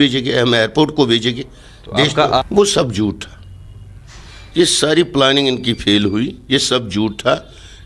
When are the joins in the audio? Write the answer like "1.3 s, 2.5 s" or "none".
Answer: 2.4 s

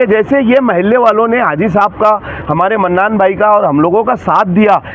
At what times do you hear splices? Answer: none

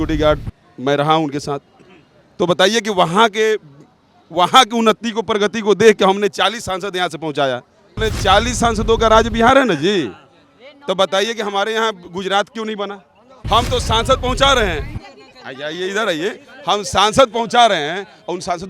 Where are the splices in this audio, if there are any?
8.0 s, 13.3 s

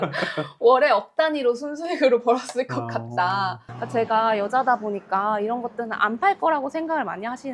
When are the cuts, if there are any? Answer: 3.7 s

